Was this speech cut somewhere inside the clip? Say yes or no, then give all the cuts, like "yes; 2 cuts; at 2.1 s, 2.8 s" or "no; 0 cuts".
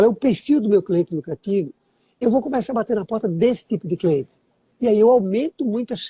no; 0 cuts